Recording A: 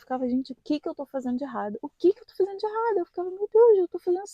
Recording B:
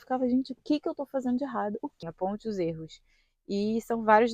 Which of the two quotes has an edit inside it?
B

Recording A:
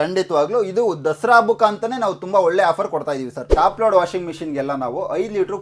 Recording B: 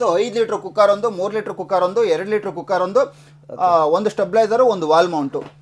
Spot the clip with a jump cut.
A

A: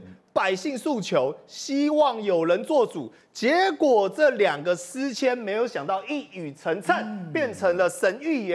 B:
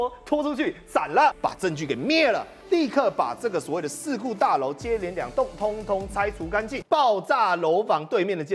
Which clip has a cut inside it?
B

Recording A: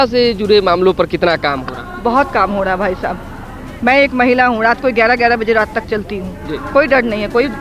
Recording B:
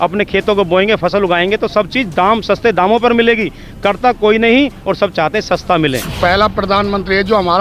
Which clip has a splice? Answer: B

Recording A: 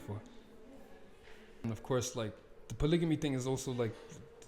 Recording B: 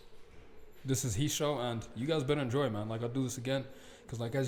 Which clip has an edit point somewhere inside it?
A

